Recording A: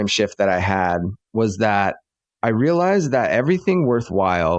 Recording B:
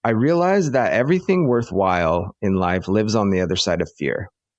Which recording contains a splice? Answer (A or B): A